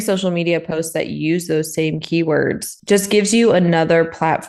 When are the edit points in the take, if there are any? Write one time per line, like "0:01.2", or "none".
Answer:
none